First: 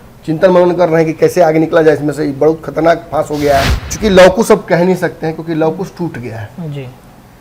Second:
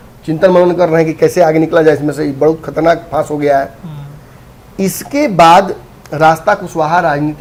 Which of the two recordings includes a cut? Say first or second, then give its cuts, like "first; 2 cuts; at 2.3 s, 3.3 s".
first; 1 cut; at 3.8 s